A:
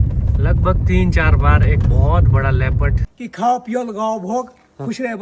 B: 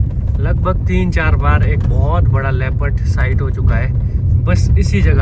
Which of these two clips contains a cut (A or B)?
A